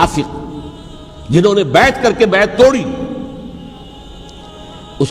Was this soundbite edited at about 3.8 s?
yes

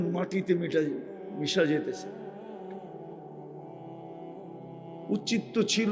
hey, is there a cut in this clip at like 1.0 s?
no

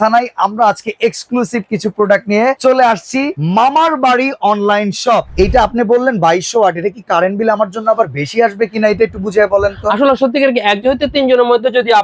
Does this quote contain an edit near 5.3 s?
yes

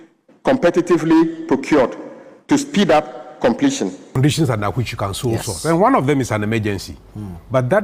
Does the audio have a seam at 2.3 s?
no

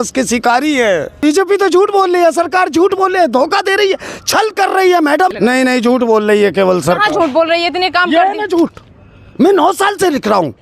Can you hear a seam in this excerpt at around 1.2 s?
yes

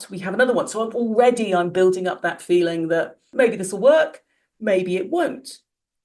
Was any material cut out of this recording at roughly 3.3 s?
yes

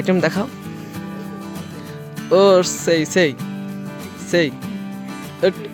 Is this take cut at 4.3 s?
no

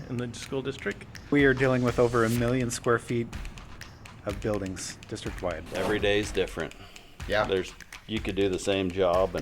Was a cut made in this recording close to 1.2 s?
yes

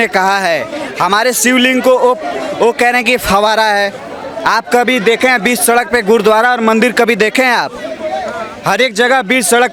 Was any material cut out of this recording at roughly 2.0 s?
no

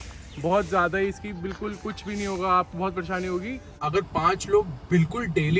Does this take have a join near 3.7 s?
yes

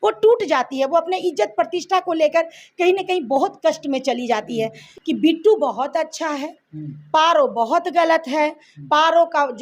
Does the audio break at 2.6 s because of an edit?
no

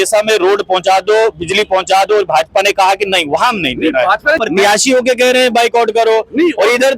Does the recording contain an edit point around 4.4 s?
yes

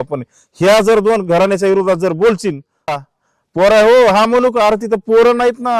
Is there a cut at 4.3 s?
no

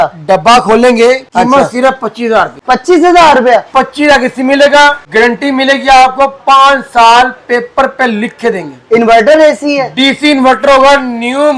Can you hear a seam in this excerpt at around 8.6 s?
no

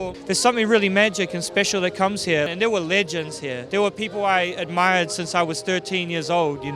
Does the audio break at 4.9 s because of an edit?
no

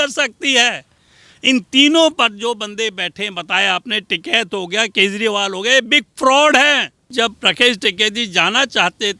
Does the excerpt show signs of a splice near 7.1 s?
yes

